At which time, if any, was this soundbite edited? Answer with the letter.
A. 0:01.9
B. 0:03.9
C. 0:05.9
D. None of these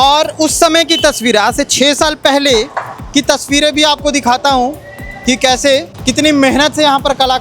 C